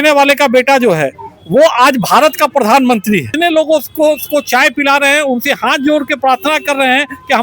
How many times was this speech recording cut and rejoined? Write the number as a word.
one